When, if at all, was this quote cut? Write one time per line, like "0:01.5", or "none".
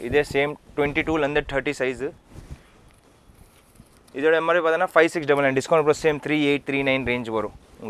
none